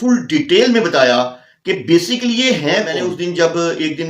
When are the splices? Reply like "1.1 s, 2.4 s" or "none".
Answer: 3.0 s

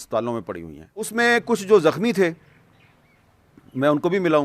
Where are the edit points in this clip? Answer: 1.1 s

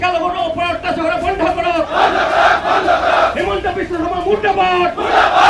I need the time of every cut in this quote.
none

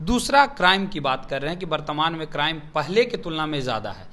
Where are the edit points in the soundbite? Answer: none

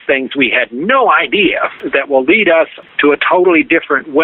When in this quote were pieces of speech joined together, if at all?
1.8 s, 2.8 s

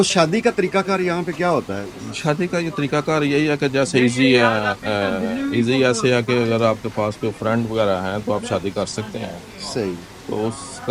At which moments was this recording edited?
none

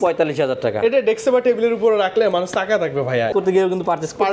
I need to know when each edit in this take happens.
3.3 s

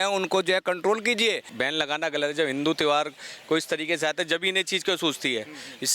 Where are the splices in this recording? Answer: 1.5 s

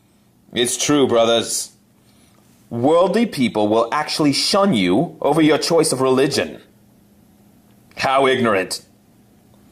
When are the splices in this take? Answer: 2.0 s

